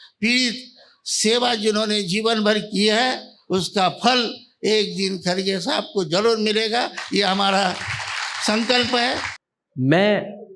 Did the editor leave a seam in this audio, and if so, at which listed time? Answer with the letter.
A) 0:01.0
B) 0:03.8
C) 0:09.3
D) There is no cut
C